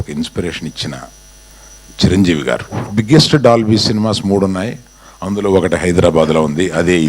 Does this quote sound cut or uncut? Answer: cut